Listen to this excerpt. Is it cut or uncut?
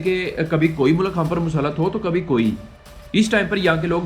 cut